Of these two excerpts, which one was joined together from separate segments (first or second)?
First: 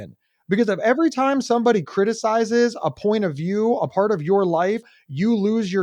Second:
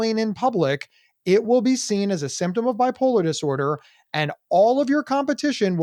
first